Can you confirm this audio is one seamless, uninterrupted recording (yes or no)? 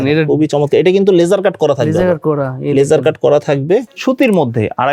no